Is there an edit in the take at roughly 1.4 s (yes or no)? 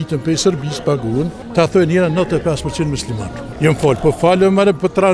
yes